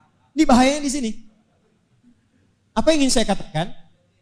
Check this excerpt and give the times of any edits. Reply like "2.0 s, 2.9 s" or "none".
none